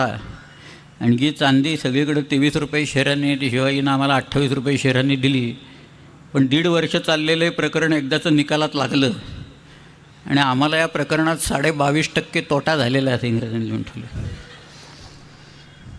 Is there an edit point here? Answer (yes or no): no